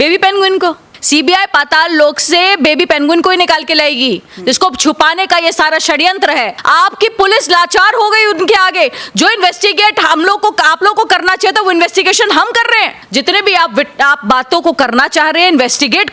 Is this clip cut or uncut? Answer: cut